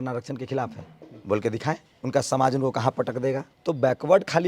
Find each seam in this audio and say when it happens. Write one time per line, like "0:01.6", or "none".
0:01.9
0:03.5